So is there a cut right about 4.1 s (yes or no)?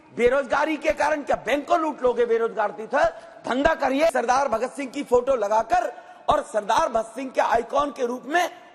yes